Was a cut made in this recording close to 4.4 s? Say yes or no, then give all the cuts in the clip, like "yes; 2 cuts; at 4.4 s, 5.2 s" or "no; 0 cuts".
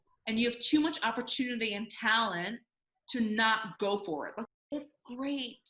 yes; 1 cut; at 4.4 s